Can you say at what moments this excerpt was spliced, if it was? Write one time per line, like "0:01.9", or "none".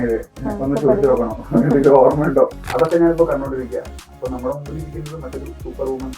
0:02.6